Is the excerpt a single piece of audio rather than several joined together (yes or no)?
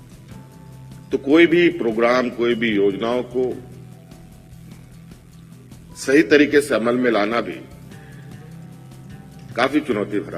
no